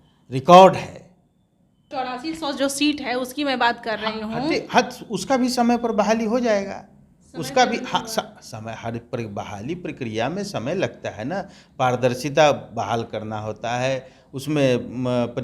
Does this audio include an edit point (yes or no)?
yes